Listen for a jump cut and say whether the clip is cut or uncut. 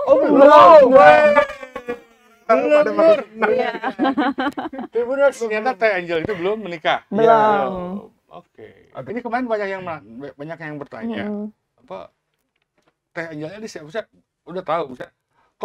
cut